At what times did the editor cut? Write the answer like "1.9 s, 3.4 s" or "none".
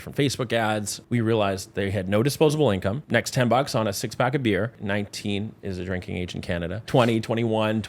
0.9 s, 3.0 s, 4.8 s, 6.8 s